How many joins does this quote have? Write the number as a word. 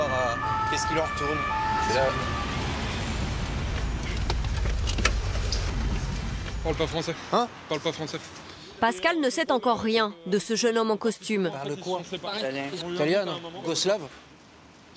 one